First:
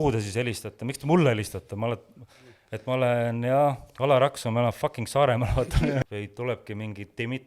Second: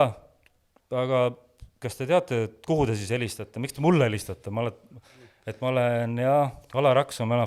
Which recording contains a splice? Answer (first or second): first